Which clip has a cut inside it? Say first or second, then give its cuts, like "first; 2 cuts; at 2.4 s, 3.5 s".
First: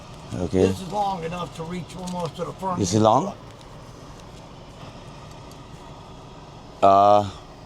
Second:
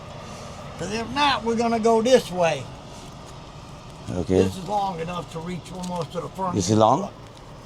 first; 1 cut; at 4.8 s